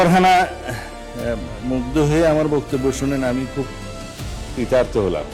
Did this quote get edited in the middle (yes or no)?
no